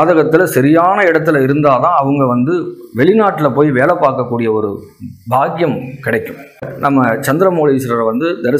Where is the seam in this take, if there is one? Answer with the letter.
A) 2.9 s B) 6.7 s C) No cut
B